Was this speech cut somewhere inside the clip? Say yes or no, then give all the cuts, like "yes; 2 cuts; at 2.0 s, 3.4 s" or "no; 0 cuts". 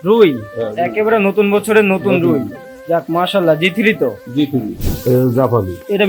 yes; 1 cut; at 4.8 s